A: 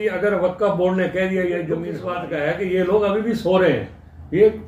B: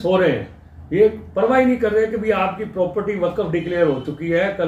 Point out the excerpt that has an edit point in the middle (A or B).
A